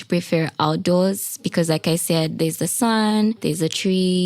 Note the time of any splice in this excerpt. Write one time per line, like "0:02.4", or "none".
0:03.3